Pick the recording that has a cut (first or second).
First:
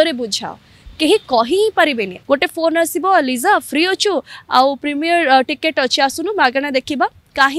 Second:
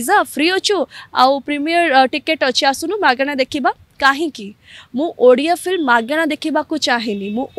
first